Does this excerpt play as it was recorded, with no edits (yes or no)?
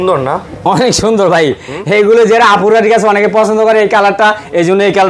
yes